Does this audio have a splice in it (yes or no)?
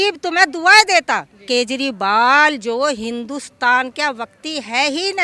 yes